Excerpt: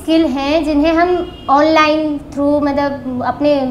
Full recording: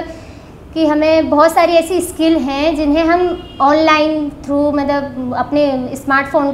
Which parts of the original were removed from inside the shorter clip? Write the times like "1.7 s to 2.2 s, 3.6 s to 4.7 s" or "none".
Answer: none